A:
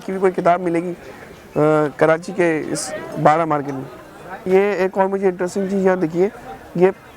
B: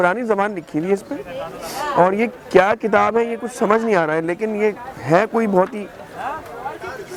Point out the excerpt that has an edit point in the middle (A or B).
A